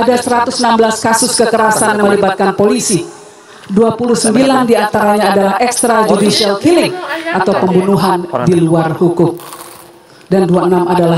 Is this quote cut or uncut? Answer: uncut